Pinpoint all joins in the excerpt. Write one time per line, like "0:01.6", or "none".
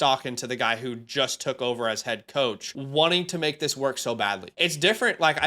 0:02.7
0:04.5